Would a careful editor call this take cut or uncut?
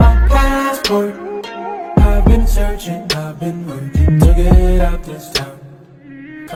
uncut